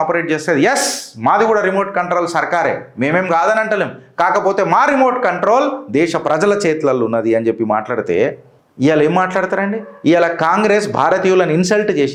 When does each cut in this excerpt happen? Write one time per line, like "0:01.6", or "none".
none